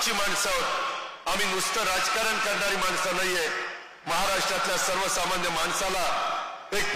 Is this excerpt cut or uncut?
uncut